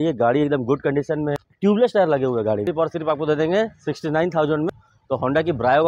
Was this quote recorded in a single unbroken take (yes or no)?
no